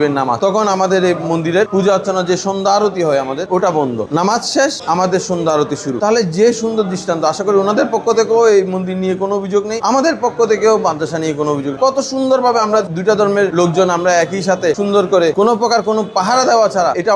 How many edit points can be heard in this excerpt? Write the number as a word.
zero